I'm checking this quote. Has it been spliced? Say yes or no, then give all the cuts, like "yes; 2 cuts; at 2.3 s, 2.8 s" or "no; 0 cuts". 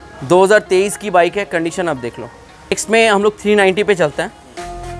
yes; 1 cut; at 2.7 s